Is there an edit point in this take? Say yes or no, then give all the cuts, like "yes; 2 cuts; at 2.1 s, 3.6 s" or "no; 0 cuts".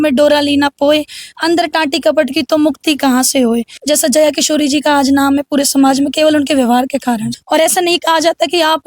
yes; 2 cuts; at 3.7 s, 7.2 s